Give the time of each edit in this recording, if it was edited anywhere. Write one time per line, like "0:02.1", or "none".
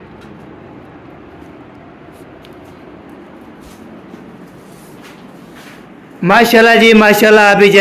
none